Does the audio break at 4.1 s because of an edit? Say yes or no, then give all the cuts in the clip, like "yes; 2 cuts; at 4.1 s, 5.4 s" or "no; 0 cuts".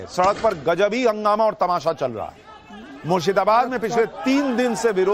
no; 1 cut; at 1.1 s